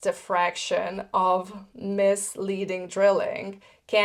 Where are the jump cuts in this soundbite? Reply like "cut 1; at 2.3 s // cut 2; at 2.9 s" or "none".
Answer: none

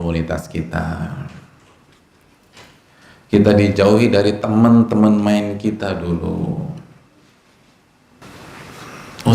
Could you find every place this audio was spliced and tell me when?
cut 1; at 8.2 s

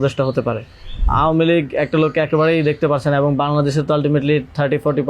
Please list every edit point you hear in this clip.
cut 1; at 1.0 s

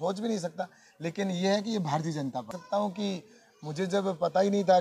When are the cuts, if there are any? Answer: cut 1; at 2.5 s

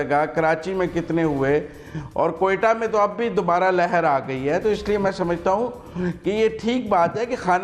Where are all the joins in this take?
none

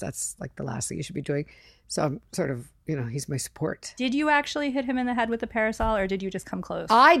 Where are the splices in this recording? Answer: cut 1; at 3.9 s

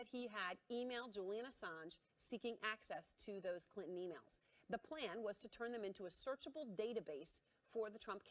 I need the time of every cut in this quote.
cut 1; at 6.0 s

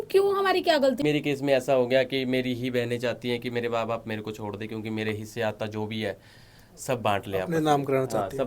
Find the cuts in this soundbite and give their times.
cut 1; at 1.0 s

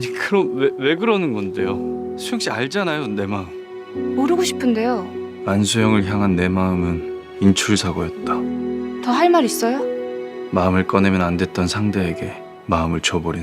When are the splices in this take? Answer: cut 1; at 2.1 s

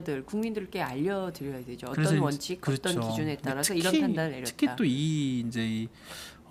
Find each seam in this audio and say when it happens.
none

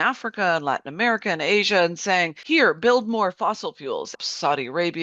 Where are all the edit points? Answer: cut 1; at 2.4 s // cut 2; at 4.2 s

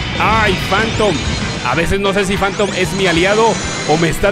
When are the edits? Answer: cut 1; at 1.5 s

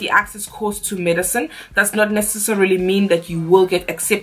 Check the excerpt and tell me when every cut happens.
none

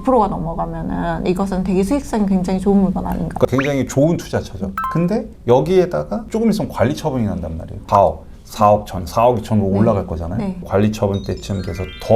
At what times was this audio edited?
cut 1; at 3.4 s // cut 2; at 7.8 s // cut 3; at 10.6 s

